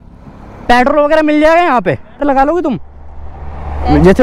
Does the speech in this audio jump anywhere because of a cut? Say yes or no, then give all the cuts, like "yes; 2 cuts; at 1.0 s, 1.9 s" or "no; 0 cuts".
yes; 1 cut; at 2.2 s